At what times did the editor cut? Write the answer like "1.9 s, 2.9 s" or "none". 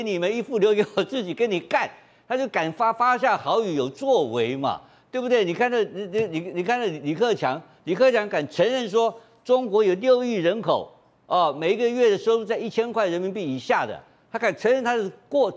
none